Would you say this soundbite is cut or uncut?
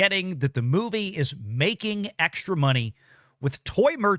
uncut